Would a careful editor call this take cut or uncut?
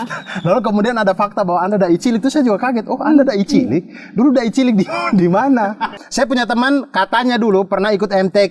cut